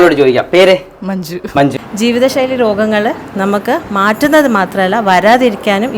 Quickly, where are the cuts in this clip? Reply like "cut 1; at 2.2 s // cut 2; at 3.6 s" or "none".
cut 1; at 1.7 s